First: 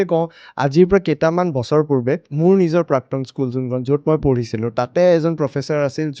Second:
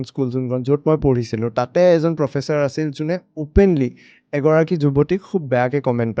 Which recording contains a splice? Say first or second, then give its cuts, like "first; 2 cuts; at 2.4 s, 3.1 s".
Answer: first; 1 cut; at 2.3 s